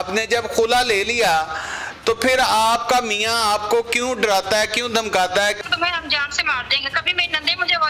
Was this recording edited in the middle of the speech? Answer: yes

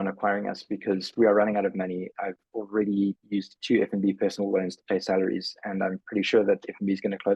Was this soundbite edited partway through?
no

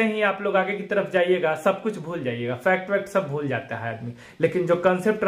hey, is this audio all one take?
yes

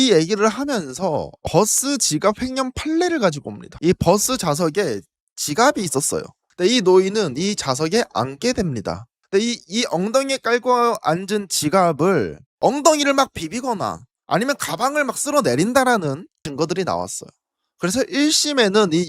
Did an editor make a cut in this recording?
no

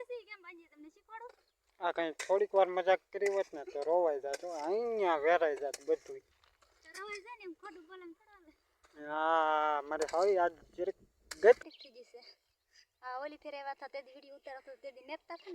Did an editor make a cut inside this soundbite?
yes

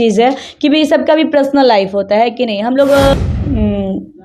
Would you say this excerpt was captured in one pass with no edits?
no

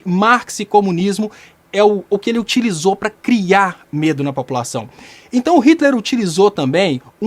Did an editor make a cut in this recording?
no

